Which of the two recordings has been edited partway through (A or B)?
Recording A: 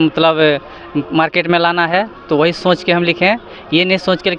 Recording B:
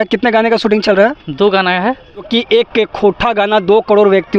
B